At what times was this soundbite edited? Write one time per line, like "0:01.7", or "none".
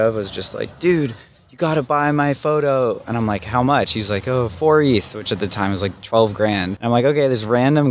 0:06.7